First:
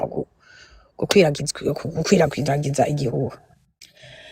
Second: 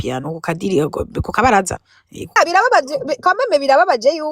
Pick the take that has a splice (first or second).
second